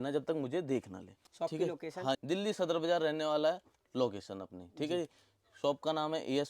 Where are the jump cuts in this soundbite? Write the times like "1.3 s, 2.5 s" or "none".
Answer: 1.2 s